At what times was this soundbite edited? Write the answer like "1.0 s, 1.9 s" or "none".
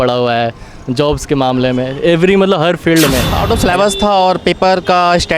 3.3 s